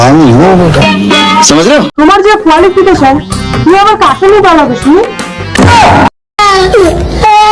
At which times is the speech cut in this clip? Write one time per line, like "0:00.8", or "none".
0:01.9